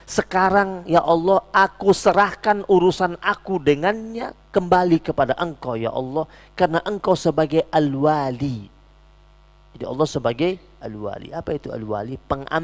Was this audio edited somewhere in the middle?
no; 0 cuts

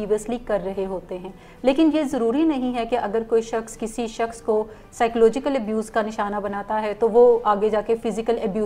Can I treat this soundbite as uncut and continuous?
yes; 0 cuts

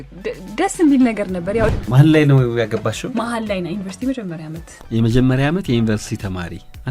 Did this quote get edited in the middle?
yes; 1 cut; at 1.7 s

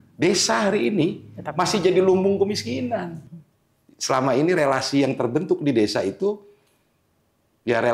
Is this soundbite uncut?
no; 1 cut; at 3.2 s

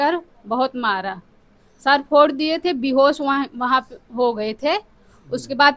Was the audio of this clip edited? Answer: no; 0 cuts

